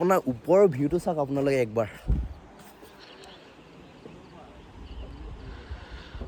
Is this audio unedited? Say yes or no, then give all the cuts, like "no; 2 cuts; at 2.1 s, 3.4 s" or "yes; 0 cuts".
yes; 0 cuts